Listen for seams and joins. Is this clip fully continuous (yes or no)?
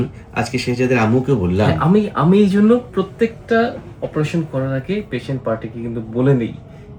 yes